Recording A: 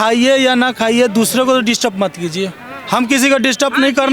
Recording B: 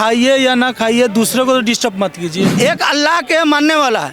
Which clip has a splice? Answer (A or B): B